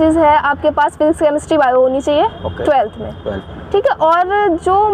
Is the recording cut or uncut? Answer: uncut